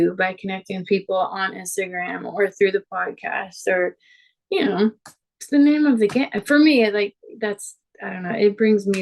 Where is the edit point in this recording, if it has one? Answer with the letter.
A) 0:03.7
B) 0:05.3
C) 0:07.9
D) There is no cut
D